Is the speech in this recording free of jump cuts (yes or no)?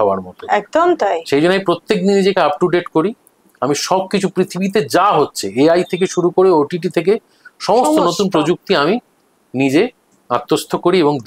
yes